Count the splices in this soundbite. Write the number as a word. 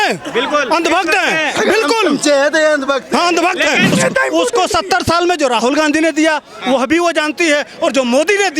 one